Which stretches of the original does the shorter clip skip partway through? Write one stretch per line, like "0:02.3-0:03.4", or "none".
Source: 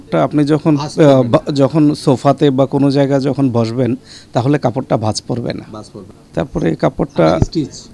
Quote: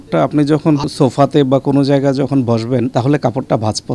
0:00.9-0:02.0
0:04.0-0:04.3